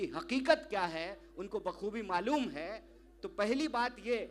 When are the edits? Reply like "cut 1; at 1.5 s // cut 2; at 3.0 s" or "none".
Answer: none